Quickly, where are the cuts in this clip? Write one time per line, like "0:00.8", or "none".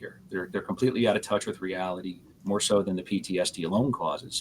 0:02.3